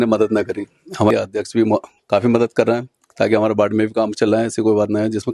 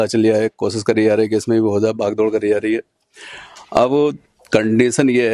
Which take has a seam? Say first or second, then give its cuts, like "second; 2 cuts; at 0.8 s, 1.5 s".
first; 1 cut; at 1.1 s